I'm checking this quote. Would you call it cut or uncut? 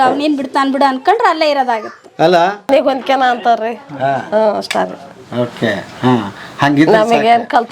cut